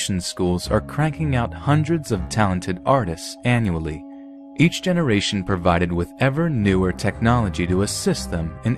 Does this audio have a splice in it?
yes; 1 cut; at 1.2 s

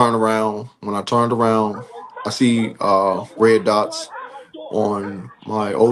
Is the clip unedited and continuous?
yes; 0 cuts

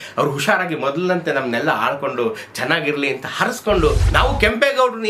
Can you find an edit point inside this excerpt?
yes; 1 cut; at 4.0 s

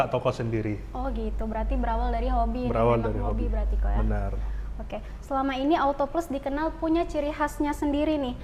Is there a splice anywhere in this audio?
no; 0 cuts

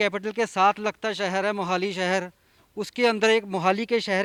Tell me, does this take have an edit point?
no; 0 cuts

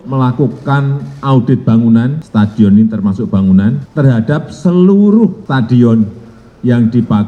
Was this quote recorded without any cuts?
yes; 0 cuts

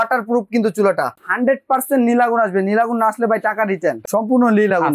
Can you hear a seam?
yes; 2 cuts; at 1.1 s, 4.0 s

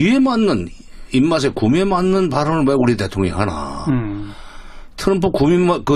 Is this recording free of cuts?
no; 1 cut; at 1.2 s

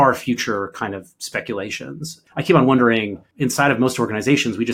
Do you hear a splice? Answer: yes; 2 cuts; at 2.1 s, 3.2 s

